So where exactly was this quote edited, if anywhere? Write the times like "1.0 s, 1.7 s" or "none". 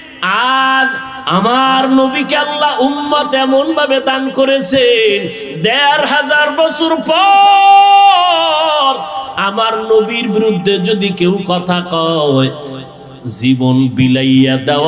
none

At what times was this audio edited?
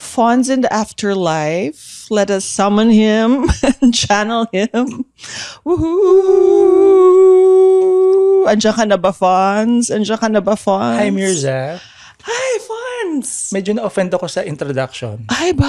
none

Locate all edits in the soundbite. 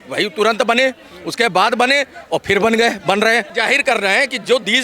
3.5 s

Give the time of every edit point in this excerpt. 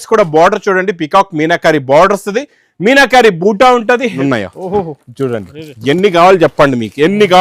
4.2 s

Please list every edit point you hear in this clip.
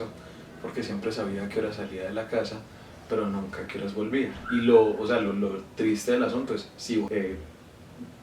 7.1 s

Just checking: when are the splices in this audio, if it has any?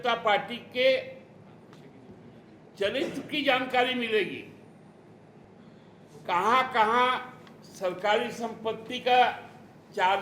5.4 s

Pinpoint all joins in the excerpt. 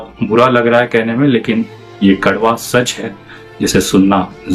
none

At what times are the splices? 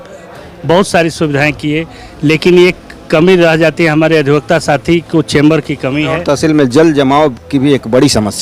6.1 s

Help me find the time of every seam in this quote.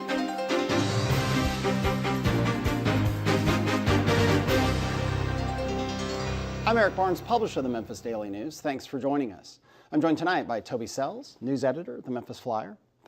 3.6 s

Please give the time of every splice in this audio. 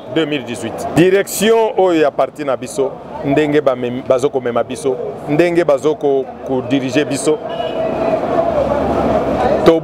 0.9 s

